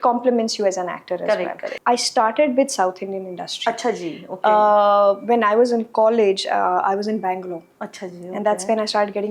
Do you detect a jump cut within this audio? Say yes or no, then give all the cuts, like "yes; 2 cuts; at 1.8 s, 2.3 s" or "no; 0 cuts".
yes; 1 cut; at 1.7 s